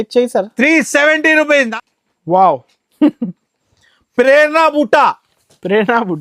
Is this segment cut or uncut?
cut